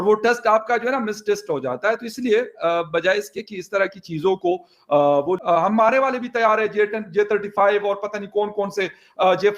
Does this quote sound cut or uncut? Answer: cut